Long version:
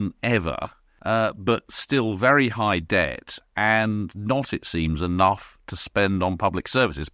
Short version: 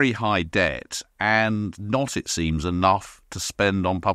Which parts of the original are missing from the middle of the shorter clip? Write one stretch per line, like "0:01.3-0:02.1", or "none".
none

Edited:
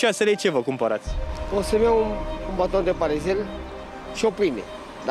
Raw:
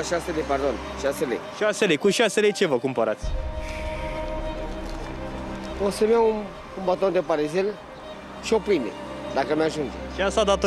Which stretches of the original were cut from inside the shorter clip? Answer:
0:03.5-0:05.6

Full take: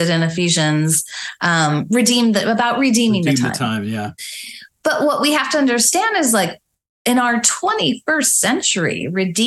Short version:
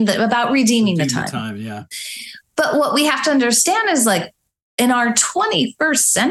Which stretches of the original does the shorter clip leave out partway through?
none

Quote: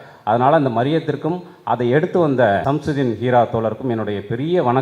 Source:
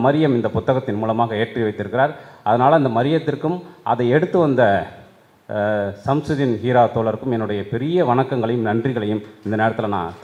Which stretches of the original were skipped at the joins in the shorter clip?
0:04.8-0:06.0

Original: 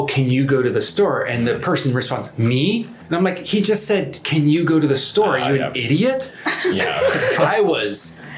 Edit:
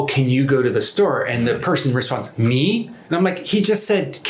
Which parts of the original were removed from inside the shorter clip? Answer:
none

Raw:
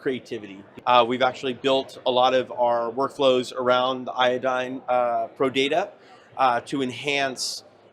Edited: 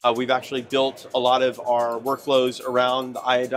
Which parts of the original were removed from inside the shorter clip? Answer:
none

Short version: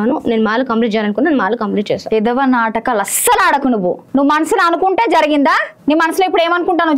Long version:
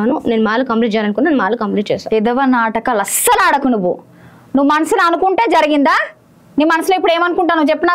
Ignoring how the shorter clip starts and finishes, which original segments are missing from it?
0:04.0-0:04.4
0:06.1-0:06.4

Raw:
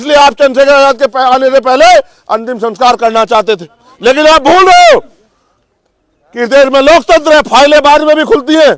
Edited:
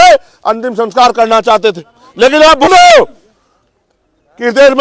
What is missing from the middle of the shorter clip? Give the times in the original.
0:04.5-0:04.6

